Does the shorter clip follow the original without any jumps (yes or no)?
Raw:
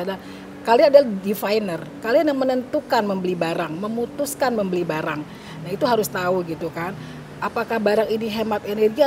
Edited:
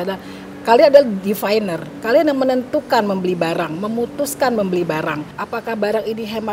no